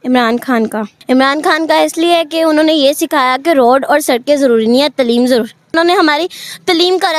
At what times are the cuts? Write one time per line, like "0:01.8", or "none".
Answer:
0:00.9
0:05.7